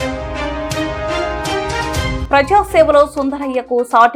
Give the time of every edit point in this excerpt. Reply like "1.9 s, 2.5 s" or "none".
2.2 s